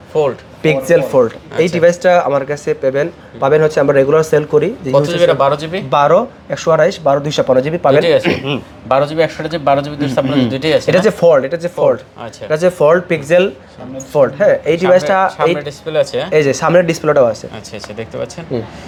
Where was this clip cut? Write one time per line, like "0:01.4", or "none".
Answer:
none